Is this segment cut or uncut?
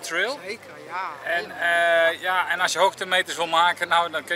uncut